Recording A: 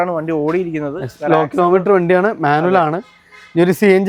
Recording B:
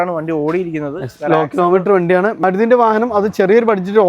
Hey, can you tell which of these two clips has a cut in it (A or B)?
B